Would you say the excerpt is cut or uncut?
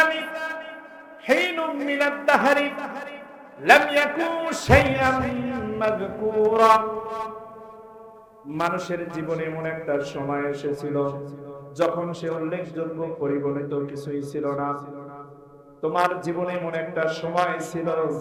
uncut